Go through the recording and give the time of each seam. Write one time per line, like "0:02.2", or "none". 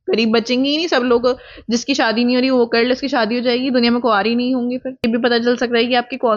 0:05.0